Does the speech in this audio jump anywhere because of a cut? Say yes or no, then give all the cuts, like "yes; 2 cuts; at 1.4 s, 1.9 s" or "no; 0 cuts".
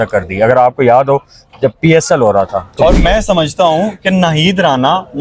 yes; 1 cut; at 2.6 s